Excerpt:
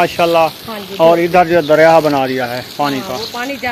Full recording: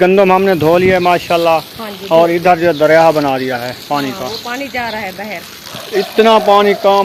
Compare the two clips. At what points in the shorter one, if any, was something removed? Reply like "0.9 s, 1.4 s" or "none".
none

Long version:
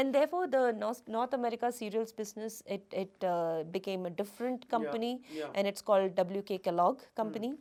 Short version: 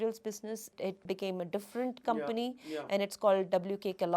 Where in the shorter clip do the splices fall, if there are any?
1.0 s

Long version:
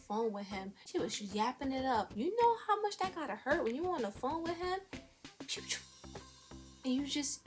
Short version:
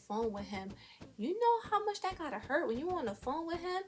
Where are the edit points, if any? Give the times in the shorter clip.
1.1 s

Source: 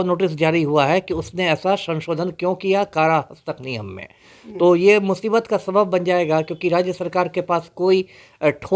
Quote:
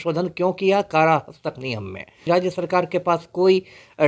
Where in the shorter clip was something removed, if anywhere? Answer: 2.3 s

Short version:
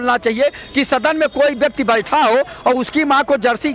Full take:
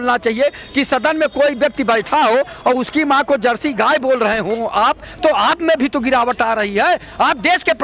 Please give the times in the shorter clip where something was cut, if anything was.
none

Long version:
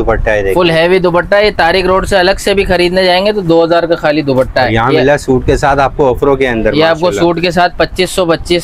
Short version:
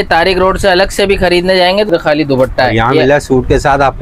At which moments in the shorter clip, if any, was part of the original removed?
1.9 s

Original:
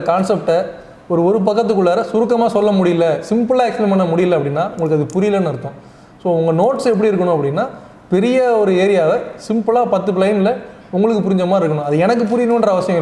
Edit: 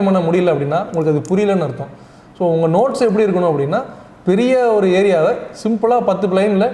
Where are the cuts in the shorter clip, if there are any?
none

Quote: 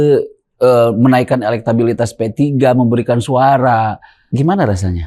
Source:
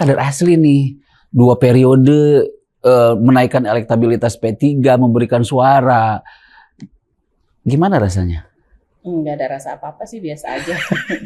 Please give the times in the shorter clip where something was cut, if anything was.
4.1 s

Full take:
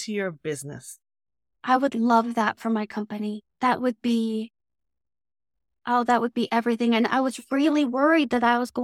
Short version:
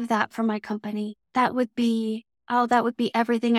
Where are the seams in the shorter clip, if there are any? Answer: 2.3 s

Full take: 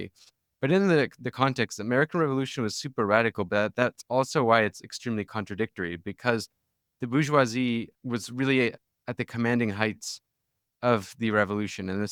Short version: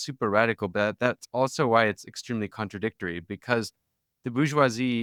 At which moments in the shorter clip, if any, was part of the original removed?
none

